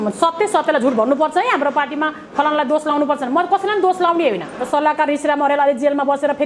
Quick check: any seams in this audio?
yes; 1 cut; at 4.6 s

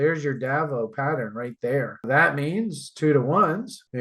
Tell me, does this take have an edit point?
yes; 1 cut; at 2.0 s

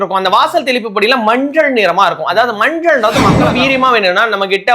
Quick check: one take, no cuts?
no; 1 cut; at 3.4 s

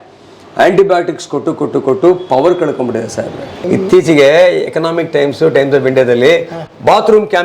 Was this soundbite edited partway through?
yes; 1 cut; at 3.5 s

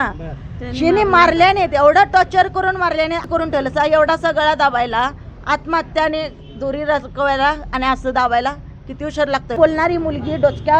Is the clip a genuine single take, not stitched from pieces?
no; 2 cuts; at 3.2 s, 9.6 s

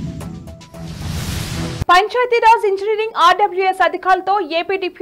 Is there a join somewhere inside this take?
no; 0 cuts

